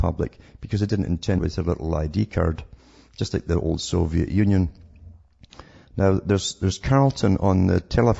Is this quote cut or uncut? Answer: uncut